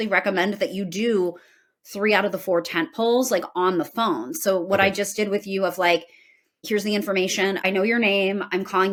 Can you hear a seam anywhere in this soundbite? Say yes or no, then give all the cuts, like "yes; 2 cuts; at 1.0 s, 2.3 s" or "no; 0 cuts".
no; 0 cuts